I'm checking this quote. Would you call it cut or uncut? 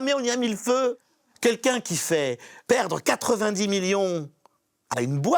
cut